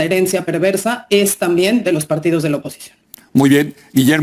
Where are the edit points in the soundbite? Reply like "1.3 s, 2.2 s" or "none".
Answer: none